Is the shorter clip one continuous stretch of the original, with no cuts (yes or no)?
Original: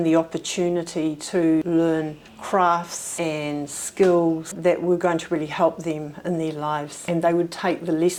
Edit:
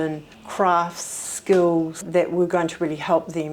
no